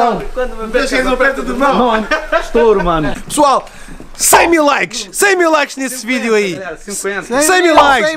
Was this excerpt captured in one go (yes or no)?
no